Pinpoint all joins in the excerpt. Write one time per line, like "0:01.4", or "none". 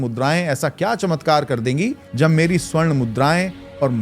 0:02.0